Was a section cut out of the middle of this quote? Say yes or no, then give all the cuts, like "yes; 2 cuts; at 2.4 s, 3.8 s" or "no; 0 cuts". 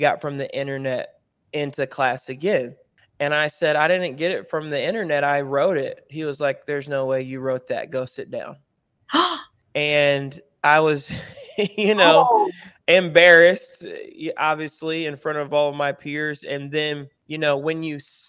yes; 2 cuts; at 9.5 s, 17.2 s